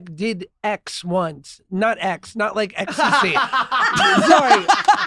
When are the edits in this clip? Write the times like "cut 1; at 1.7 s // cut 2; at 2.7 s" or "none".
none